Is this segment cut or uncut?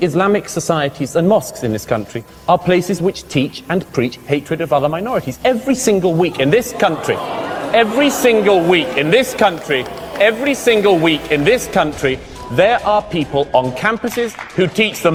uncut